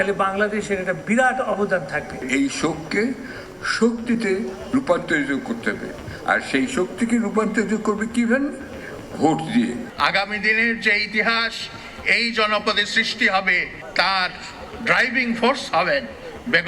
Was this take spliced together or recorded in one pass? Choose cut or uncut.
cut